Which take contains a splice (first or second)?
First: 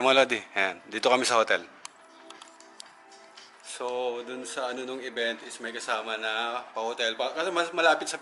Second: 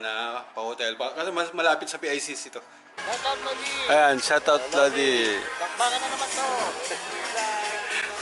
second